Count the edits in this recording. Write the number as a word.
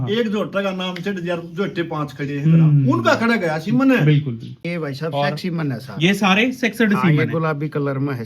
one